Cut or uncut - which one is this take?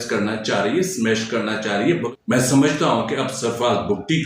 cut